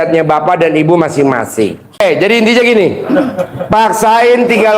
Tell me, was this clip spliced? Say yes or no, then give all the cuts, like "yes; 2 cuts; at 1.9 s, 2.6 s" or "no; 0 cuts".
yes; 1 cut; at 1.8 s